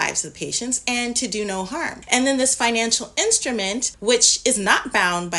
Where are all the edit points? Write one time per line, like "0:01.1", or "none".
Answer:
0:02.0
0:03.9